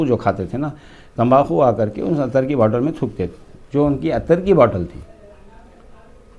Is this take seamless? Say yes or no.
yes